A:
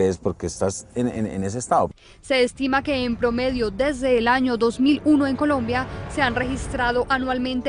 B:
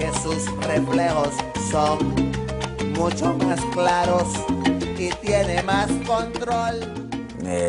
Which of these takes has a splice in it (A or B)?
A